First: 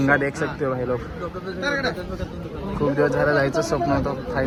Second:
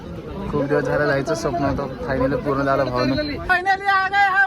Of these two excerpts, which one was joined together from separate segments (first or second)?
second